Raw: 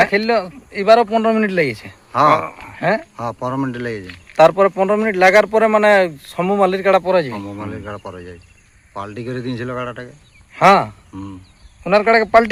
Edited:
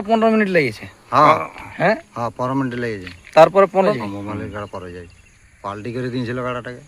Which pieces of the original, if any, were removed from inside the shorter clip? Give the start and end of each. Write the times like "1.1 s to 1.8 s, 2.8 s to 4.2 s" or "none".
5.0 s to 7.3 s